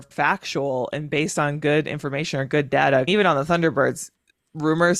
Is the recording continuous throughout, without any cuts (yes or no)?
no